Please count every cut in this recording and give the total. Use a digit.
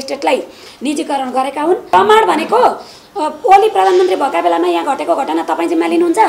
1